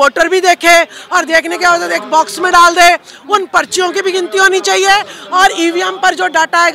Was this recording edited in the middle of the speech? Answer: no; 0 cuts

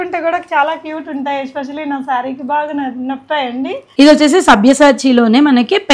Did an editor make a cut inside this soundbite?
yes; 1 cut; at 3.8 s

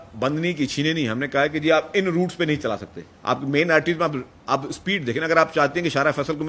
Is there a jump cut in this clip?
yes; 1 cut; at 2.6 s

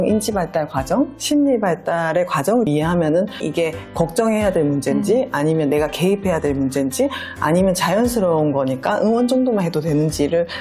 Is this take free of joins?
yes; 0 cuts

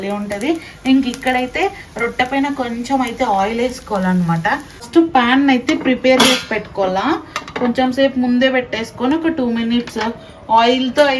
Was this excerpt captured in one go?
no; 1 cut; at 4.9 s

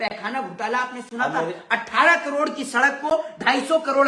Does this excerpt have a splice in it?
no; 0 cuts

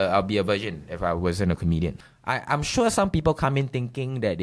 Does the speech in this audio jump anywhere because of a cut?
yes; 1 cut; at 2.1 s

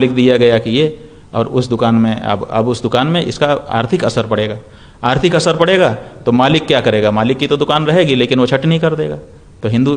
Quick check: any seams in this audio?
no; 0 cuts

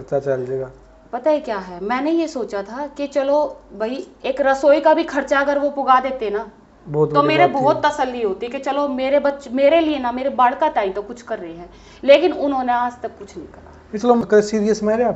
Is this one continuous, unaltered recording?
no; 1 cut; at 14.2 s

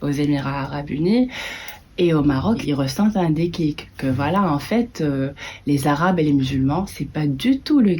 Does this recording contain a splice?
yes; 1 cut; at 2.6 s

